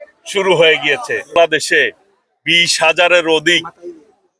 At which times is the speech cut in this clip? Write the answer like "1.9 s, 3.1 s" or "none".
1.2 s